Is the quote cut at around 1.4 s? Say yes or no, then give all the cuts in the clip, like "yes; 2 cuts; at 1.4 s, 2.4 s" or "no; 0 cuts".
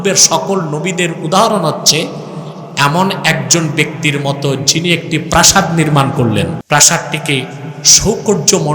no; 1 cut; at 6.6 s